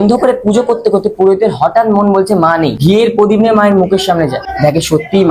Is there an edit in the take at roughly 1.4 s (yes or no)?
no